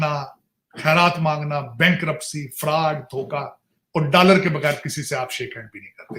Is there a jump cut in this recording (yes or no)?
no